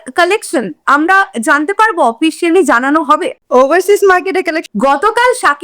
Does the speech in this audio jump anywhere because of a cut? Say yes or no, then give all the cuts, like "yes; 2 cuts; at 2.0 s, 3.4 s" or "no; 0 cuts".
yes; 1 cut; at 4.6 s